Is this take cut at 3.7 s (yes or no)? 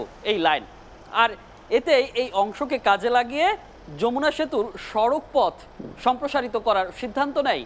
no